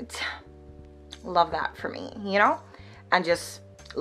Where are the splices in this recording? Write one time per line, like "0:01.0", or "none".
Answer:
none